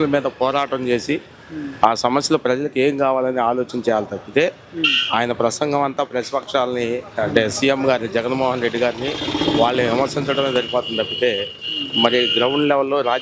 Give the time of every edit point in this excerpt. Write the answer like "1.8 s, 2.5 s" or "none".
none